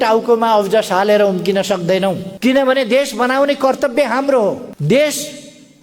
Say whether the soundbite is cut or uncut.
cut